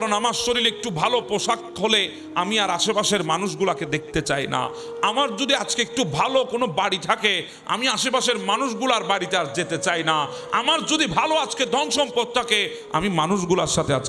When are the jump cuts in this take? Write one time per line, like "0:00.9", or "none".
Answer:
none